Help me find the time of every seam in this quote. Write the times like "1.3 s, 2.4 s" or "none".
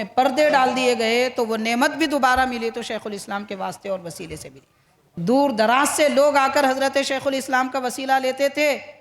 5.2 s